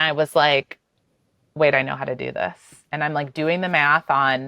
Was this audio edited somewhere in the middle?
yes; 1 cut; at 2.7 s

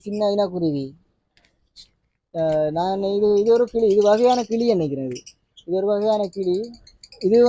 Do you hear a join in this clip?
no; 0 cuts

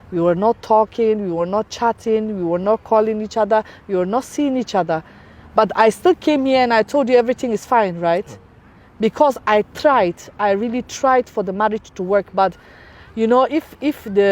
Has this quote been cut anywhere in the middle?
no; 0 cuts

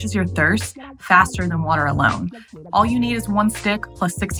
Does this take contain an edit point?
yes; 1 cut; at 2.5 s

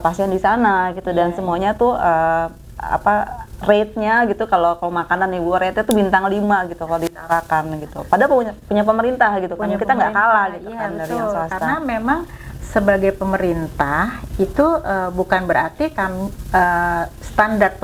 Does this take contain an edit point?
no; 0 cuts

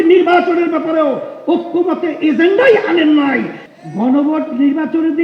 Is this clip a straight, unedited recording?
no; 1 cut; at 3.6 s

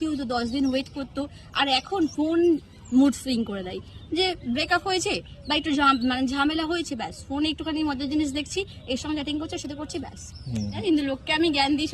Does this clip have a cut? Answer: yes; 1 cut; at 10.8 s

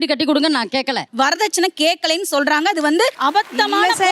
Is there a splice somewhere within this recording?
yes; 2 cuts; at 1.1 s, 3.2 s

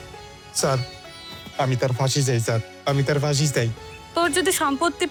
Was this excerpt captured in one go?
yes; 0 cuts

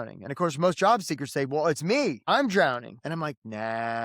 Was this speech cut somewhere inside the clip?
yes; 2 cuts; at 2.2 s, 2.9 s

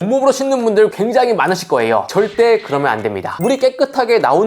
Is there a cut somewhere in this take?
yes; 1 cut; at 3.4 s

